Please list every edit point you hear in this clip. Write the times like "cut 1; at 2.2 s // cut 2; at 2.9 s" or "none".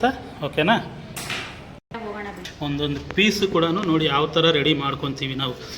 cut 1; at 2.5 s